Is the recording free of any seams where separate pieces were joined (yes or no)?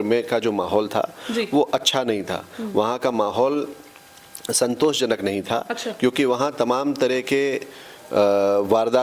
yes